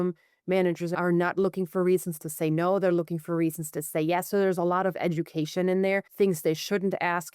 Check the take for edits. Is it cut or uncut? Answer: cut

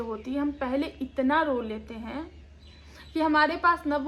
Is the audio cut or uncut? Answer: uncut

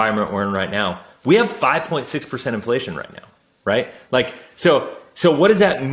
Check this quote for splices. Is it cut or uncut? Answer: uncut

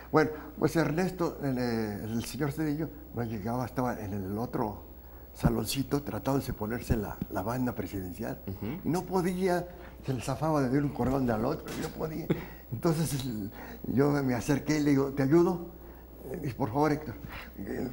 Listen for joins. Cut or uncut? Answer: uncut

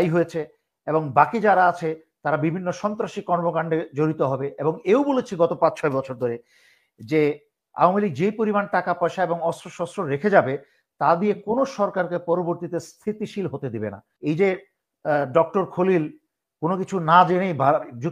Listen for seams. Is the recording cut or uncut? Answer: cut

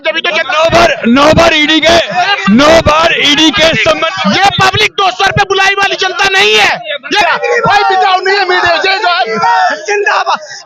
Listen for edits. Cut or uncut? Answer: cut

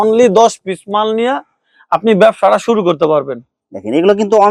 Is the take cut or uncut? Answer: uncut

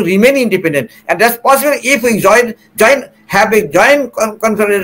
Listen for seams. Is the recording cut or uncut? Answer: uncut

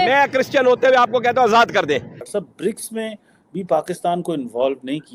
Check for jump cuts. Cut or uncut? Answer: cut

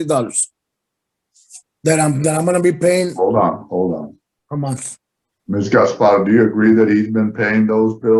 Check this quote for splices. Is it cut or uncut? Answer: uncut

